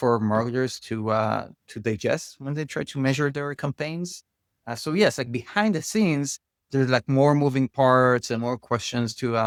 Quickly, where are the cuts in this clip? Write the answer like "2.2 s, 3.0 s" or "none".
none